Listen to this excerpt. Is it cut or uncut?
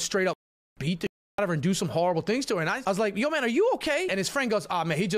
cut